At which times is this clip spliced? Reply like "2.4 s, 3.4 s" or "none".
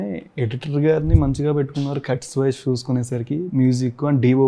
none